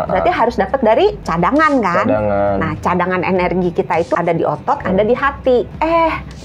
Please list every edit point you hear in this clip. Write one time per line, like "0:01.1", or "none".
0:01.2
0:04.1
0:05.7

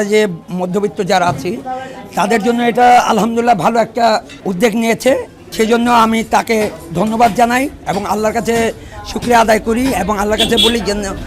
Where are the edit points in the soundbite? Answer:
0:05.4

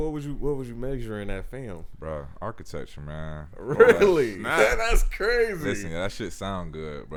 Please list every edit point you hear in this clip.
none

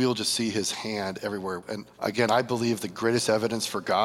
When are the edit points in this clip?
0:01.6

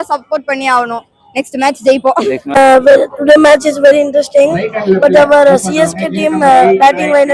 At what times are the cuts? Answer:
0:02.6

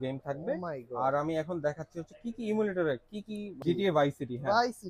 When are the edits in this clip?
0:03.6

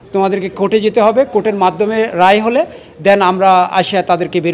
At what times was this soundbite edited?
none

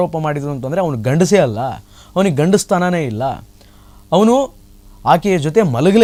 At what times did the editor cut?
none

